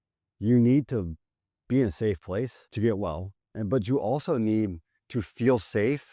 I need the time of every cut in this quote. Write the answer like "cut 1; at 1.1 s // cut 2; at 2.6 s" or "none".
cut 1; at 2.6 s

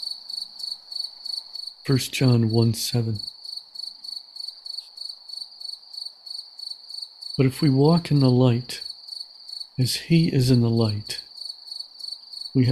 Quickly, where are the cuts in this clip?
cut 1; at 1.8 s // cut 2; at 3.3 s // cut 3; at 7.3 s

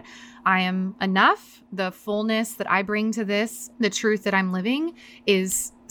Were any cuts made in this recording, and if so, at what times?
cut 1; at 3.7 s

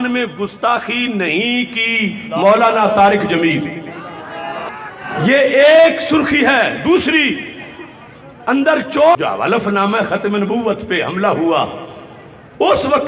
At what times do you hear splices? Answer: cut 1; at 9.2 s

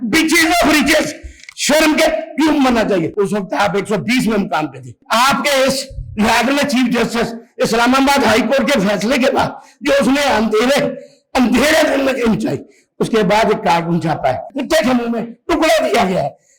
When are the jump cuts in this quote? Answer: cut 1; at 3.1 s // cut 2; at 4.9 s // cut 3; at 14.5 s

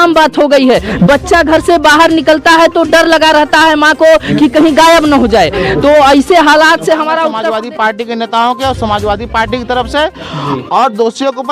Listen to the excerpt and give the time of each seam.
cut 1; at 7.4 s

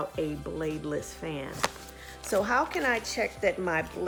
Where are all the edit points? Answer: none

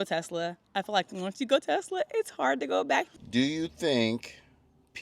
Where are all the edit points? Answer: cut 1; at 3.1 s

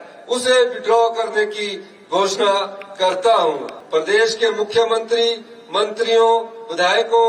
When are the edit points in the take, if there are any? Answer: cut 1; at 3.7 s

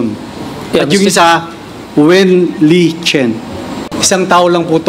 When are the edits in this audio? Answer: cut 1; at 4.0 s

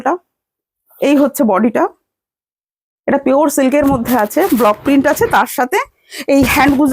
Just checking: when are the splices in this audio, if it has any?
none

